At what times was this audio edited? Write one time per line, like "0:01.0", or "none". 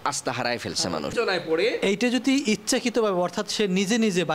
0:01.1